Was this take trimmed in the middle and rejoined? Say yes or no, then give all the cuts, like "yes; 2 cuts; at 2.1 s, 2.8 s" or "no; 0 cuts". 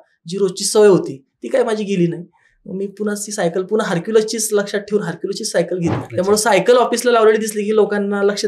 yes; 1 cut; at 6.0 s